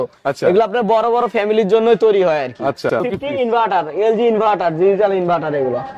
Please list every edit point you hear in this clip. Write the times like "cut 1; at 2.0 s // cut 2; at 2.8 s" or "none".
cut 1; at 3.1 s